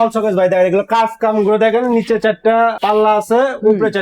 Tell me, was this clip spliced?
yes; 1 cut; at 2.8 s

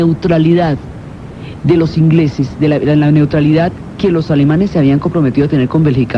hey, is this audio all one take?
yes; 0 cuts

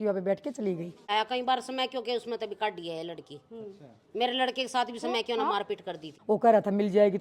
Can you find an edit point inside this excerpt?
yes; 2 cuts; at 1.1 s, 6.1 s

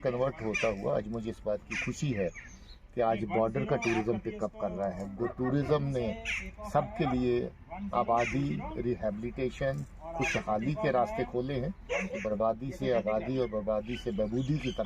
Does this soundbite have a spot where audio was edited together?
yes; 2 cuts; at 5.3 s, 12.1 s

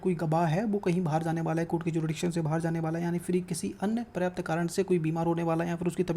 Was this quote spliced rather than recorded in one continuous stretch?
no; 0 cuts

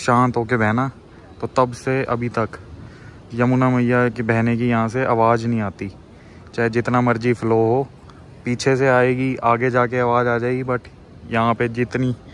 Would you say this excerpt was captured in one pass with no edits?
yes; 0 cuts

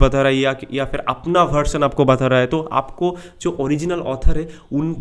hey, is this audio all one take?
yes; 0 cuts

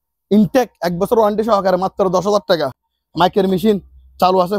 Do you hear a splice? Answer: no; 0 cuts

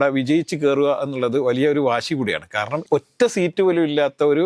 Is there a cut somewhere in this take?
yes; 1 cut; at 2.8 s

